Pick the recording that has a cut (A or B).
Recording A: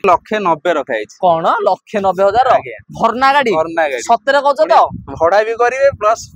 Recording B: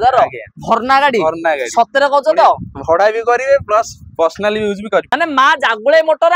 B